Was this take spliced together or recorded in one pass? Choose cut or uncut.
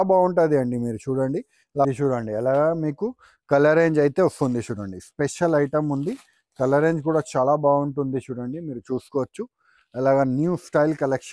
cut